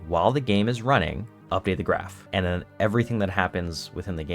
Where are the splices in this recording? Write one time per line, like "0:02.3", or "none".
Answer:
0:01.3
0:02.2

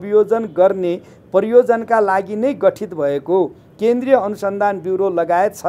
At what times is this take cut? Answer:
none

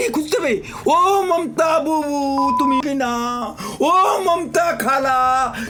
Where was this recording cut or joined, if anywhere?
none

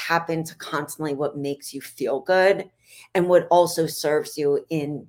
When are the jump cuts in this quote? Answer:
none

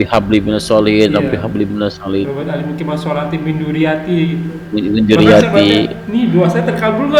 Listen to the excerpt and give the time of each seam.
none

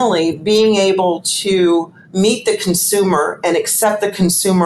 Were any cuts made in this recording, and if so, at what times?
0:02.0

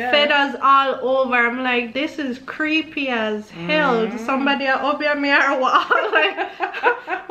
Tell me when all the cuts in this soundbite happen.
none

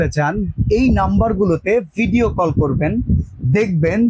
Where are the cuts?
none

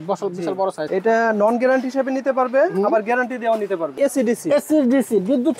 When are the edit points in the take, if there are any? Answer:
0:00.8
0:04.0

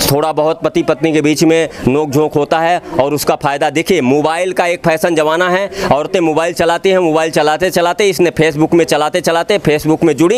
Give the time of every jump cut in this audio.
none

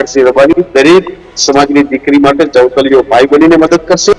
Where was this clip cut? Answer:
none

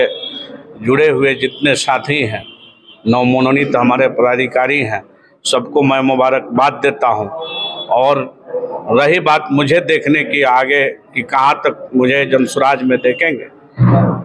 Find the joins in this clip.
none

